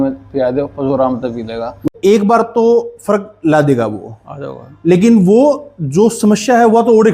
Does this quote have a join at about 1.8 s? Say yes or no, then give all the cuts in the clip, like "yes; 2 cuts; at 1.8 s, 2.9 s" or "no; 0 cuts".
yes; 1 cut; at 1.8 s